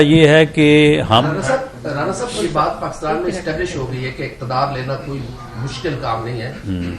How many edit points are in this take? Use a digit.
1